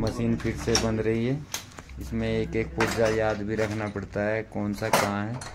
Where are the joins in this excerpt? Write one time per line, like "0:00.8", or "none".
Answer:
none

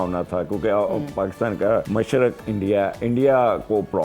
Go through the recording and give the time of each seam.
0:01.9

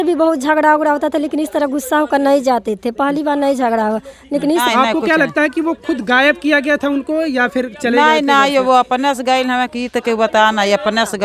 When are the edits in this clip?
0:04.5

